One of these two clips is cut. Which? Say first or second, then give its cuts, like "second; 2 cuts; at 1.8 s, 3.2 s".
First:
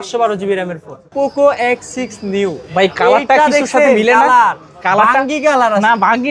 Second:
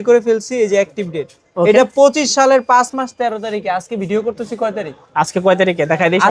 first; 1 cut; at 1.0 s